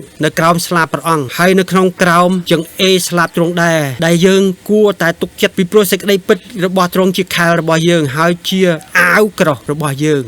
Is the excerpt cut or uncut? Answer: cut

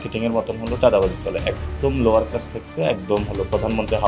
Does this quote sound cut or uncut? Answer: uncut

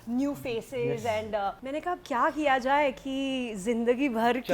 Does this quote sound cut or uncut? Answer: cut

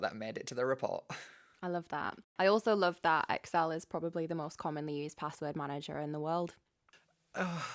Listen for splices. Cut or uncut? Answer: cut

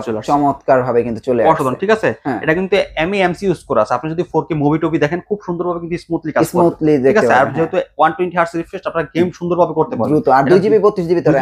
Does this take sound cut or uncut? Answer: uncut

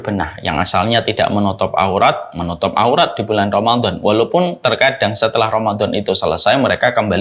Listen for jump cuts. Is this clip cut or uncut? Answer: uncut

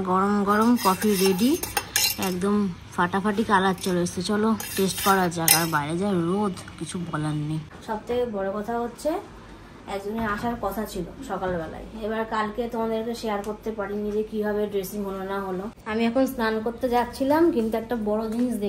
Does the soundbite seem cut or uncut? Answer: cut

